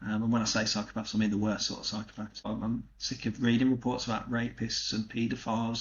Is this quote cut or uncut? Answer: cut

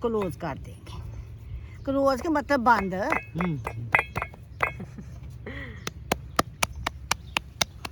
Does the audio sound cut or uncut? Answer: uncut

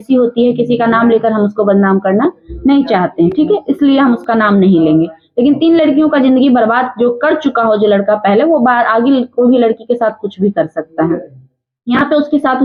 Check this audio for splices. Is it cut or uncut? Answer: uncut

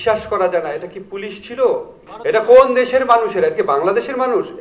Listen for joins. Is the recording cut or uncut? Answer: cut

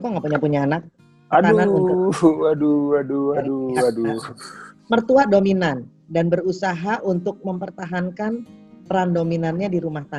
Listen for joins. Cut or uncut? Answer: uncut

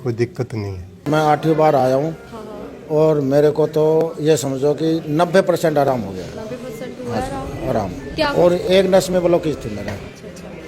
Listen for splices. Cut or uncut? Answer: cut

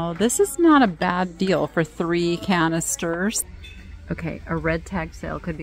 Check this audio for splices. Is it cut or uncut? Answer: cut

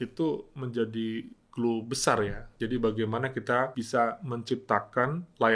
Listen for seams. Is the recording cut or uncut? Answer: cut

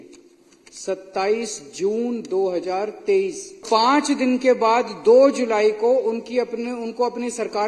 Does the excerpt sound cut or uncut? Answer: cut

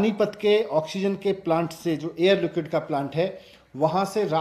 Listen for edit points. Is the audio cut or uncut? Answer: uncut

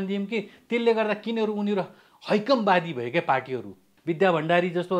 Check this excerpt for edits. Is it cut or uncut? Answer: cut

